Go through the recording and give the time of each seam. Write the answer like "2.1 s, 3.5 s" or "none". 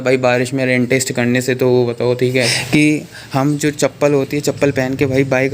2.3 s